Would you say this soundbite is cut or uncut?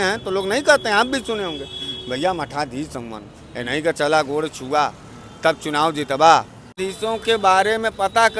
cut